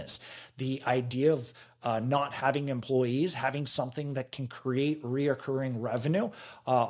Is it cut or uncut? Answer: uncut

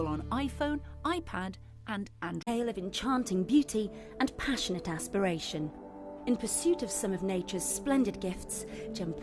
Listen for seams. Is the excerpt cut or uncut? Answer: cut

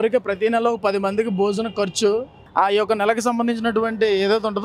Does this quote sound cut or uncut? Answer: uncut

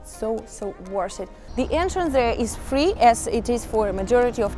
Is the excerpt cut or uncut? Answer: cut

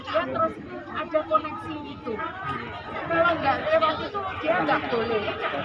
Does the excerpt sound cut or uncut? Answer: uncut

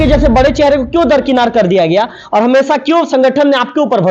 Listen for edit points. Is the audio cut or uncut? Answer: uncut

